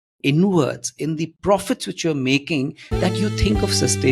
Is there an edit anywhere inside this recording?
no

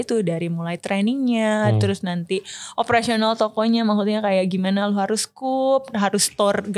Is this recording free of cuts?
yes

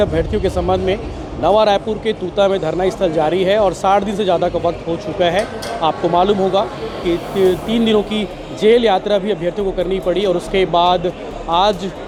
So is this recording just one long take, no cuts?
yes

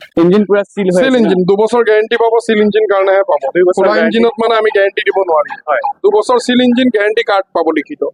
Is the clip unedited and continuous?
yes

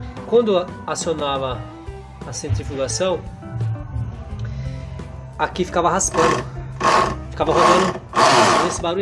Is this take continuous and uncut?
no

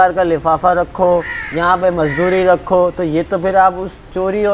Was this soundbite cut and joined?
no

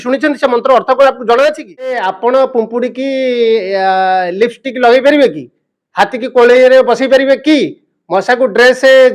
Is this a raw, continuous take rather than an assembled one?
no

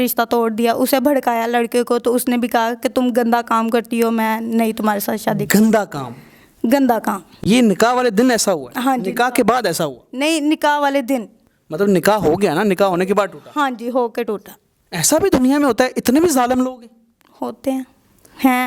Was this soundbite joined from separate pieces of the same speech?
no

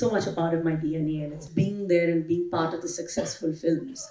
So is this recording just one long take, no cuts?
no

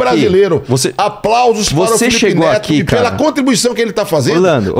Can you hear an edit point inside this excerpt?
no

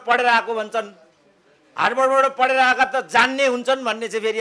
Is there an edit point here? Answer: no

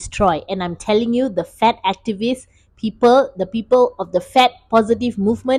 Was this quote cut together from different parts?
no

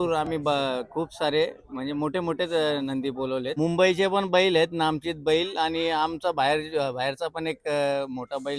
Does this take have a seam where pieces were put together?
yes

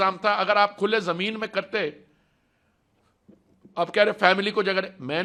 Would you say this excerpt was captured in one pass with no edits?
yes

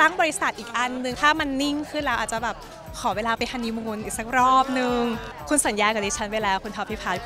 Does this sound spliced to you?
yes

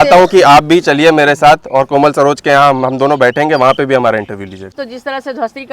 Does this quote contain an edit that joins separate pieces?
yes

